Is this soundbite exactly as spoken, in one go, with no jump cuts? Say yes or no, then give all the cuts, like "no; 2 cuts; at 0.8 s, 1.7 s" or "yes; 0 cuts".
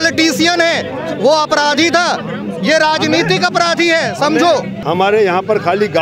no; 1 cut; at 4.8 s